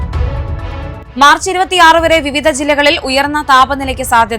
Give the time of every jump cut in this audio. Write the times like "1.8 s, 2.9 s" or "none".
1.0 s